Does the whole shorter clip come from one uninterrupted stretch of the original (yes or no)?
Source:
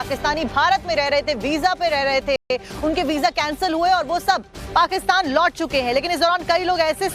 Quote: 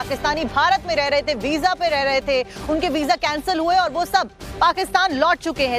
no